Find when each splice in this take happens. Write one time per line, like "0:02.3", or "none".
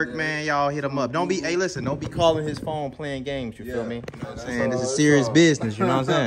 none